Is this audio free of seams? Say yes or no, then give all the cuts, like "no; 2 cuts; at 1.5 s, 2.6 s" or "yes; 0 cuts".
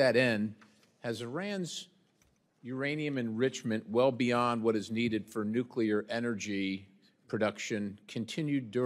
no; 1 cut; at 4.1 s